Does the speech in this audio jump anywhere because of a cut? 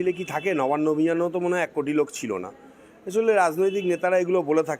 no; 0 cuts

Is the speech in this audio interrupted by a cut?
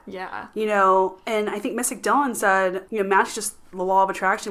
yes; 1 cut; at 2.8 s

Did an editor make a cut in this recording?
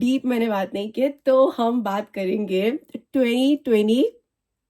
no; 0 cuts

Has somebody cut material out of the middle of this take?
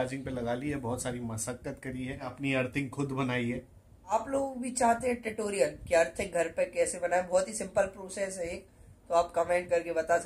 yes; 2 cuts; at 2.3 s, 4.1 s

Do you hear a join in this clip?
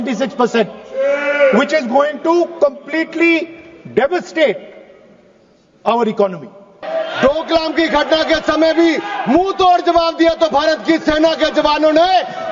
yes; 1 cut; at 6.8 s

